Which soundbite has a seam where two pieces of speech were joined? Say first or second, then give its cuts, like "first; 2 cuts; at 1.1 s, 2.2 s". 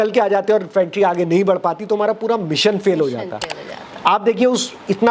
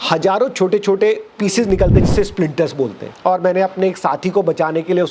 second; 1 cut; at 3.1 s